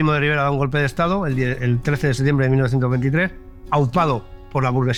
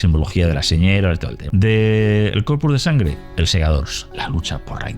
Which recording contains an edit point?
second; 2 cuts; at 1.3 s, 4.1 s

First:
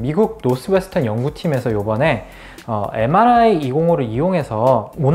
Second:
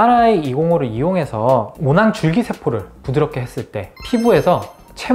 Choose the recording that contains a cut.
second; 1 cut; at 3.9 s

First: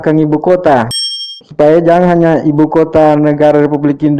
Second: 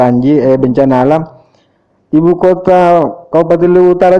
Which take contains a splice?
first; 1 cut; at 1.0 s

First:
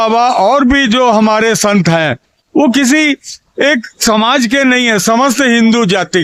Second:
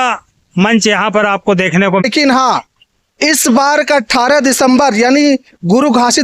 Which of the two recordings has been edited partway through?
second; 1 cut; at 2.0 s

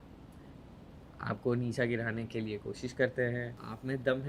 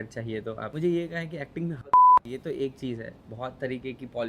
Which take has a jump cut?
second; 1 cut; at 2.3 s

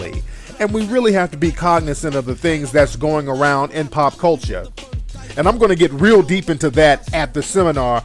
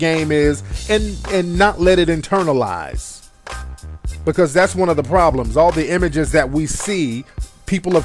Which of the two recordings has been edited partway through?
first; 1 cut; at 5.3 s

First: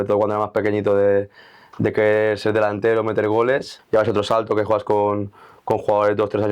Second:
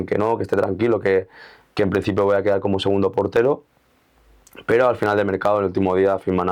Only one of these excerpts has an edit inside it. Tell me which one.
first; 1 cut; at 3.7 s

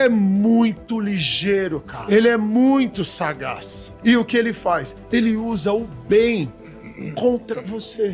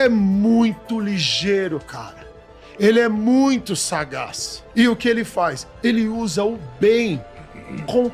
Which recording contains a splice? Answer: first; 1 cut; at 1.9 s

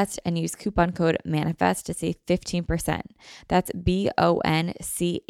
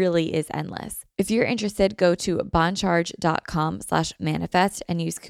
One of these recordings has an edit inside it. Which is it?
second; 1 cut; at 1.0 s

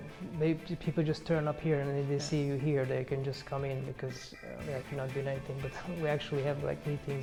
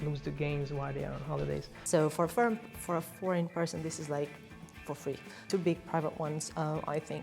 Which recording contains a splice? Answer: second; 2 cuts; at 1.7 s, 5.4 s

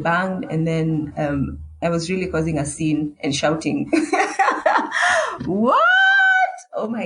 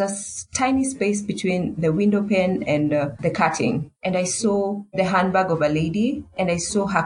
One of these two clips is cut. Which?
second; 2 cuts; at 3.2 s, 4.8 s

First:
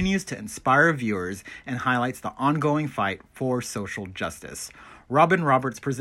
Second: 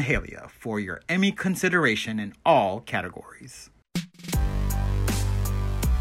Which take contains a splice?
second; 1 cut; at 3.8 s

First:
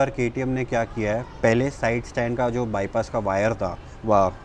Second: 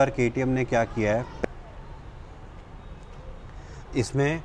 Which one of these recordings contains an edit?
second; 1 cut; at 1.3 s

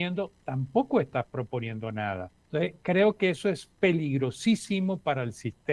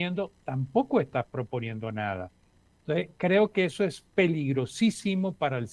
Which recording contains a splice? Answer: first; 1 cut; at 2.3 s

